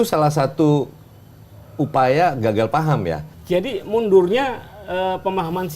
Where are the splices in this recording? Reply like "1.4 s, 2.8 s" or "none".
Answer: 3.2 s